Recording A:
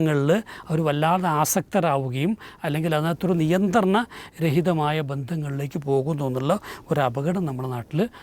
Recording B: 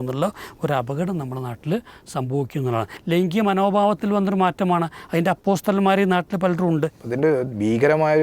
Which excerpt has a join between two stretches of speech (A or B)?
B